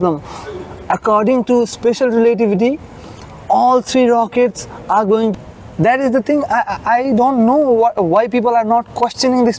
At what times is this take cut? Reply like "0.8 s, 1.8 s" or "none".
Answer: 5.3 s